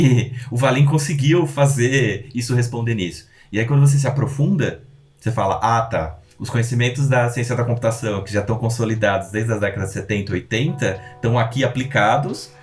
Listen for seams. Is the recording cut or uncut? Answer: uncut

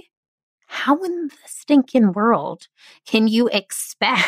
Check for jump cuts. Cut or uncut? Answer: uncut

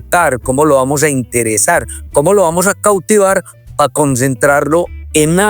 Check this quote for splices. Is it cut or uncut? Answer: uncut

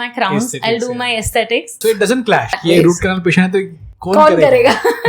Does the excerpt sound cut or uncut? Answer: cut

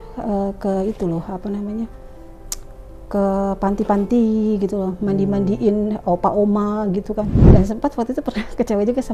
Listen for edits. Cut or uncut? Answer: cut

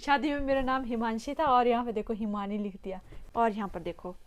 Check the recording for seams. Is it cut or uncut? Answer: cut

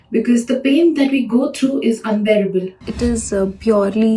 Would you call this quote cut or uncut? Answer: cut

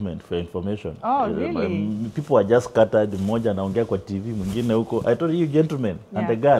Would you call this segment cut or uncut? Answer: uncut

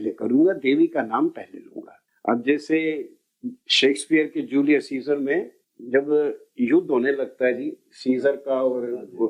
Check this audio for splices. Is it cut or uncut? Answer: uncut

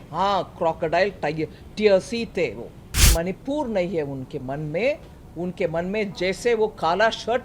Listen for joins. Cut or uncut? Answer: cut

